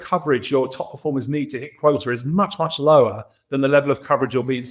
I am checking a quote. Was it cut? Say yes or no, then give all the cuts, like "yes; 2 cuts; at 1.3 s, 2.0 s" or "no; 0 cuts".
no; 0 cuts